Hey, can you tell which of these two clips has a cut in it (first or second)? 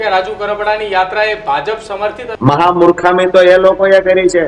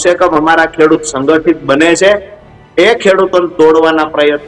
first